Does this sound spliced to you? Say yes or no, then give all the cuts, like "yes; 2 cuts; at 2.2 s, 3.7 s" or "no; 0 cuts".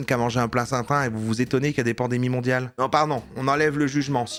no; 0 cuts